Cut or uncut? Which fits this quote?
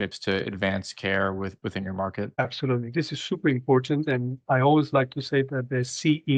uncut